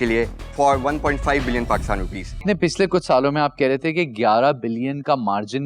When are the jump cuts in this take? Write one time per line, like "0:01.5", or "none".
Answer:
0:02.4